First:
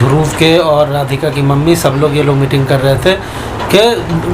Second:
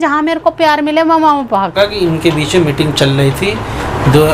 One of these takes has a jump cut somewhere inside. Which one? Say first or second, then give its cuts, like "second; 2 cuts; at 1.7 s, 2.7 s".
second; 1 cut; at 1.7 s